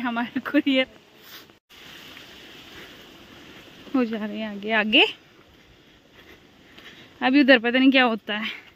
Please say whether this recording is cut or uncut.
cut